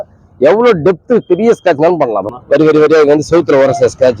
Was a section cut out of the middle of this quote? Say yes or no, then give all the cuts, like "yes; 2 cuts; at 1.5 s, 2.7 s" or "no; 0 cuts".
yes; 1 cut; at 2.3 s